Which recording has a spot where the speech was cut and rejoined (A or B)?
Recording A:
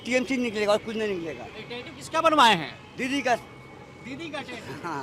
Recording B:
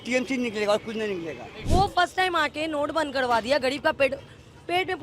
B